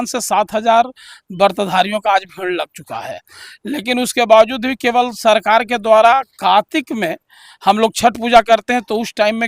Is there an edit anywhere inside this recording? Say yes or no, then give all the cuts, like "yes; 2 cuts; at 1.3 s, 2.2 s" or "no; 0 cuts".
no; 0 cuts